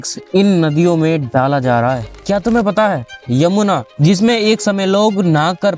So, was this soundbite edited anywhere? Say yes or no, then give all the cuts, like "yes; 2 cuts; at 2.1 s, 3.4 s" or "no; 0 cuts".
yes; 1 cut; at 2.1 s